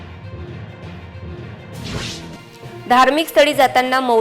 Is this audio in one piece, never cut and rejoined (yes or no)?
no